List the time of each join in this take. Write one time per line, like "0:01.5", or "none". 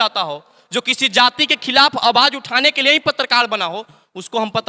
none